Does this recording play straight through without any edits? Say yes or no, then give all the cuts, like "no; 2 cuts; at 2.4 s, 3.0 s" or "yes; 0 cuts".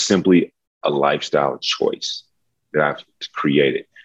yes; 0 cuts